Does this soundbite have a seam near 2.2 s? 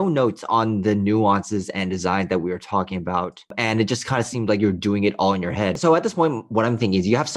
no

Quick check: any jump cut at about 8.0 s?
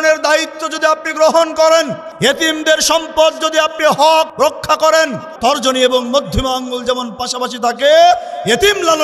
no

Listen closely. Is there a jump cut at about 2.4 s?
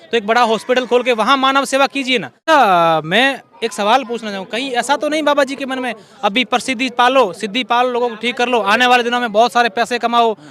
yes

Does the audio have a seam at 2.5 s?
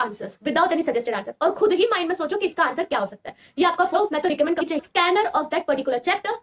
no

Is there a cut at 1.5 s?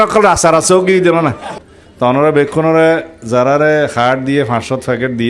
yes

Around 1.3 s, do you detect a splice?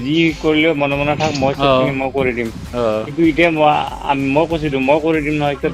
no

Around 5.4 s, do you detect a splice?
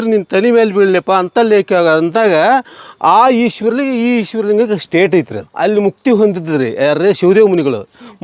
yes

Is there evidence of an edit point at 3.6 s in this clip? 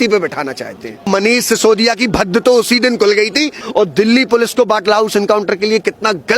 yes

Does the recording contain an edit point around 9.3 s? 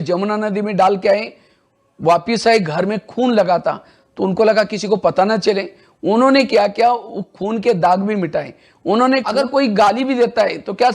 yes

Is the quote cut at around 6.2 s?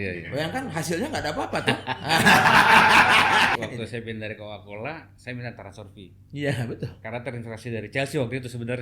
no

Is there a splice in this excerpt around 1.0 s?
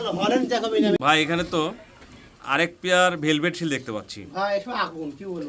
yes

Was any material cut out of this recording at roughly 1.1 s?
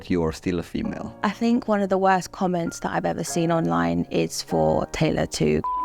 yes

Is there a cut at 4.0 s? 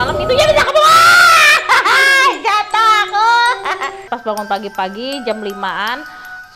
yes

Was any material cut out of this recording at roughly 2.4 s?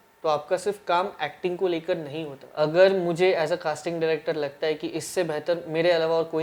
yes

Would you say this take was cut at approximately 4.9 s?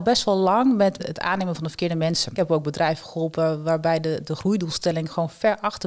no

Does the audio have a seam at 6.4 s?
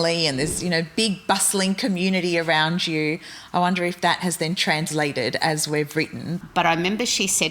yes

